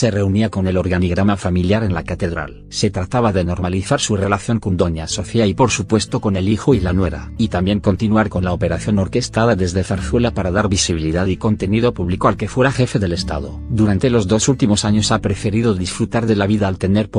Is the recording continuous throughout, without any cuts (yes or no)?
no